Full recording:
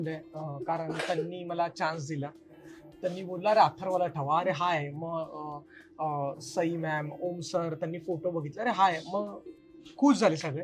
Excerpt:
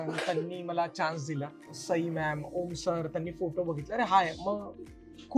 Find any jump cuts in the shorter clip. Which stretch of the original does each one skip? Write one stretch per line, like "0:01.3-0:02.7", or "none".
0:02.6-0:06.4

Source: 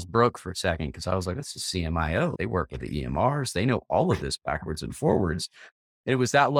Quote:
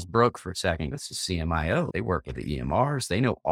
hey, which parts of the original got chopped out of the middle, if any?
0:01.0-0:01.4

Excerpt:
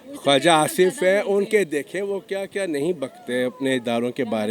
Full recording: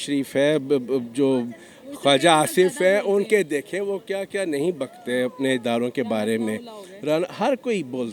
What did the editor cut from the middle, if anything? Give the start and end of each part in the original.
none

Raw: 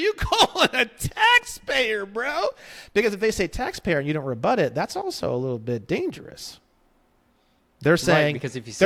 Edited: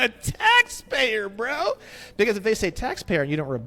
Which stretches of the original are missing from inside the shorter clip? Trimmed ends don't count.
none

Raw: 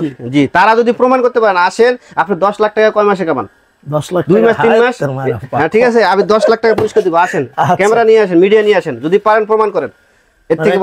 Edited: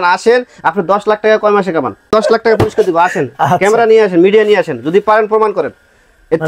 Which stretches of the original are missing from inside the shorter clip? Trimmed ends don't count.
0:03.6-0:06.3

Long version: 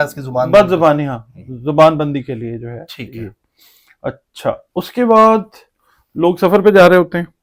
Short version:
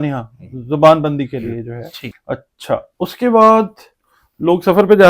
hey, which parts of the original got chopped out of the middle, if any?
0:03.0-0:03.8

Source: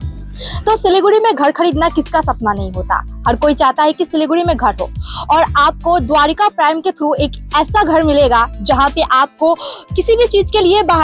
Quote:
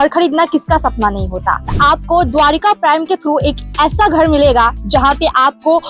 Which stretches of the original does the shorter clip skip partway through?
0:03.2-0:05.5

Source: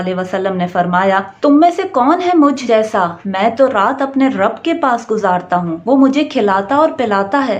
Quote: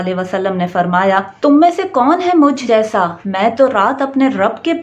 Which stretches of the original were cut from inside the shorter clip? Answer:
none

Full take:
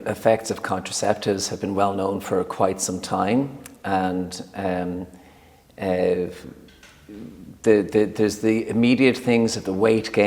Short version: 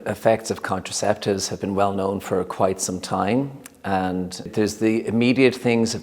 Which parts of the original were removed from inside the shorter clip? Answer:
0:04.5-0:08.1

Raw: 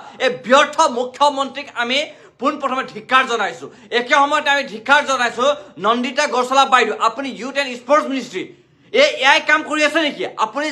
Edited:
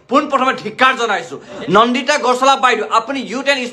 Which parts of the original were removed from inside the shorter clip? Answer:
0:03.8-0:05.6

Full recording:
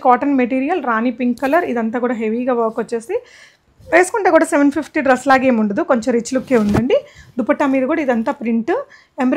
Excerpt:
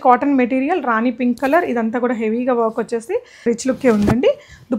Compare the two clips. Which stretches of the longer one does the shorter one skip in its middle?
0:03.4-0:06.1

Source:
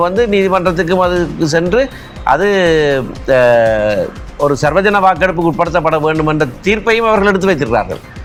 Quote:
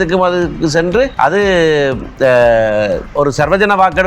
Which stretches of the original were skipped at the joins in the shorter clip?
0:01.9-0:02.2
0:04.1-0:04.3

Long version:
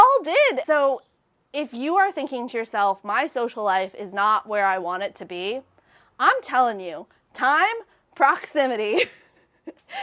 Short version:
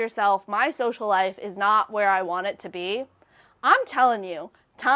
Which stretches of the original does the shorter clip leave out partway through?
none

